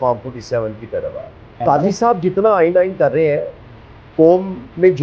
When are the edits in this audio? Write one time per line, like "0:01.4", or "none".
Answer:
0:01.5